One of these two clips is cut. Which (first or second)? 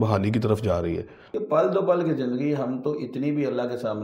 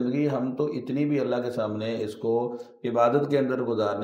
first